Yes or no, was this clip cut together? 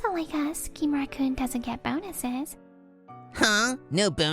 yes